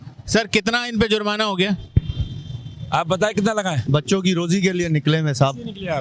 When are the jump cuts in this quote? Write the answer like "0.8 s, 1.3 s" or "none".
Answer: none